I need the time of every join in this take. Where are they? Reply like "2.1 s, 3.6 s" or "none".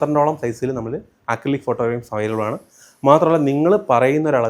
none